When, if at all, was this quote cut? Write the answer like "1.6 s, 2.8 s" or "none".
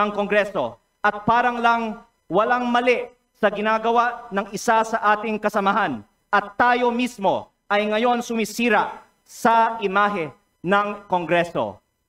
none